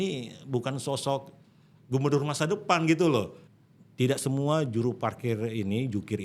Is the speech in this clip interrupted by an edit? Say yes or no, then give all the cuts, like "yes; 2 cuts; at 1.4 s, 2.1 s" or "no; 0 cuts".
yes; 1 cut; at 3.4 s